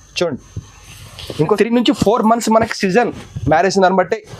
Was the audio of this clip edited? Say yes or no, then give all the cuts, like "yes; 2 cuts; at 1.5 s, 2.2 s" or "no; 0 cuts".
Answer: yes; 1 cut; at 1.6 s